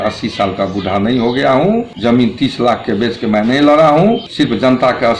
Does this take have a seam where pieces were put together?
yes; 2 cuts; at 1.9 s, 4.3 s

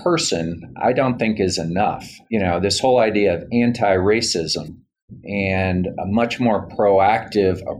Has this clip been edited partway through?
yes; 1 cut; at 2.1 s

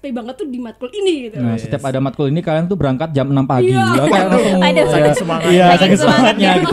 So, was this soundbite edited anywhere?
no; 0 cuts

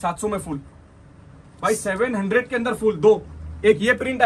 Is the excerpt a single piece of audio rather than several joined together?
yes; 0 cuts

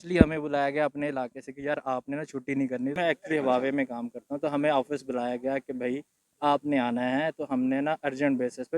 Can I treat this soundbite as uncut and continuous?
no; 1 cut; at 2.9 s

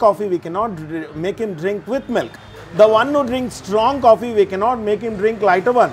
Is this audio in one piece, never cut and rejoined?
yes; 0 cuts

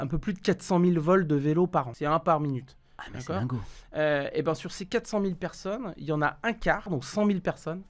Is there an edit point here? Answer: yes; 2 cuts; at 1.9 s, 6.9 s

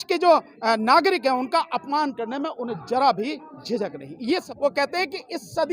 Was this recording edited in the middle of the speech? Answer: yes; 1 cut; at 4.4 s

